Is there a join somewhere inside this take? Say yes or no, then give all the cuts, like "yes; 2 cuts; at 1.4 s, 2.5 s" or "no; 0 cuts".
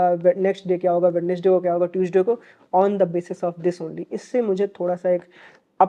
no; 0 cuts